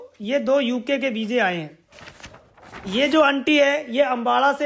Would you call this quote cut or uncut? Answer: uncut